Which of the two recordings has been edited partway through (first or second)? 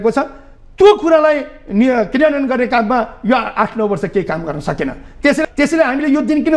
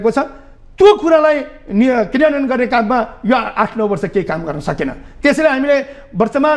first